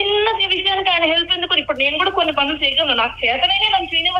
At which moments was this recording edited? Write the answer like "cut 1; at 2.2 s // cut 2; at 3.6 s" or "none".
none